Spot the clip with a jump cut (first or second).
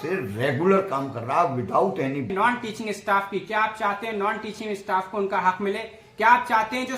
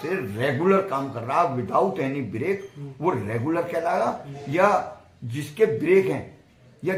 first